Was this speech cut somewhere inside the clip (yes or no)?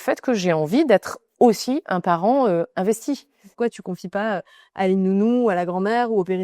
yes